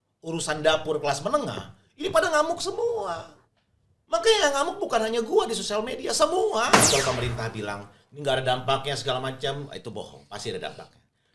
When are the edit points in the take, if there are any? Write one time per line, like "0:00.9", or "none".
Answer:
0:06.8